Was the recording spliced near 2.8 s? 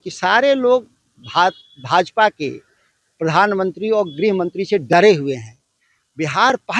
no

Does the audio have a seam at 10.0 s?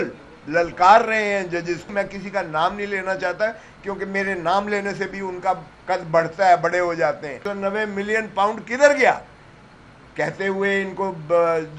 no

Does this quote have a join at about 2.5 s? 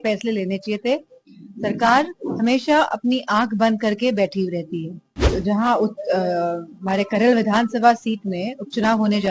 no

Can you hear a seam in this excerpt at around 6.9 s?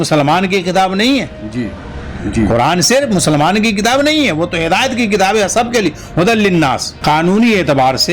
yes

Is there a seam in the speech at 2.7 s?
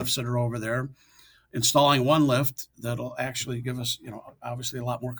no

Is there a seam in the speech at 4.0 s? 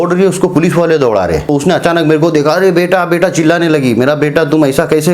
no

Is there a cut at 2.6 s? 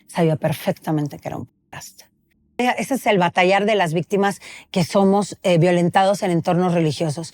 yes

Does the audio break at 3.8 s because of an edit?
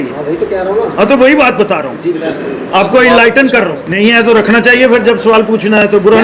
yes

